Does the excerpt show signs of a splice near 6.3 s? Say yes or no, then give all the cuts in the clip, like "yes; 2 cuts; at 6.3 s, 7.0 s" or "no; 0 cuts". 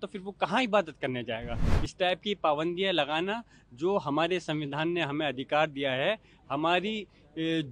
no; 0 cuts